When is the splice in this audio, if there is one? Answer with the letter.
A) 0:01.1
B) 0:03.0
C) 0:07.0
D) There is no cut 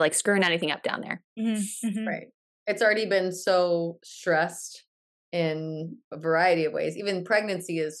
D